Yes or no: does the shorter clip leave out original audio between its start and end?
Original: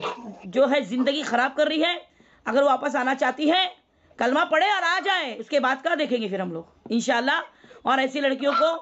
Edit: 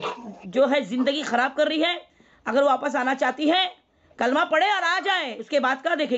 no